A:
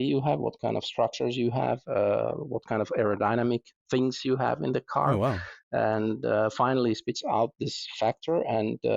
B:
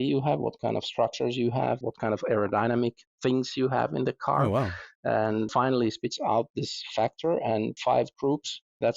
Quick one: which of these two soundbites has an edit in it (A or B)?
B